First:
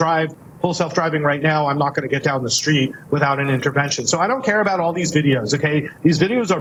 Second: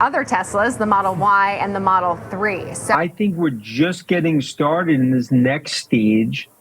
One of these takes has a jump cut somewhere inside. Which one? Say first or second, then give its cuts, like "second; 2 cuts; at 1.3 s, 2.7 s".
second; 1 cut; at 2.9 s